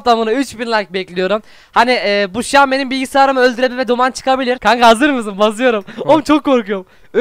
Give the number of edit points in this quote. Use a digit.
1